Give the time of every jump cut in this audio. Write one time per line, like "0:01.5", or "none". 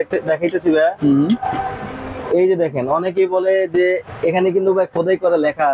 none